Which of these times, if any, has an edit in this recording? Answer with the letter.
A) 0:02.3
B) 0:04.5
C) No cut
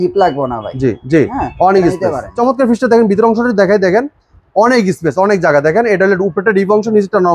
A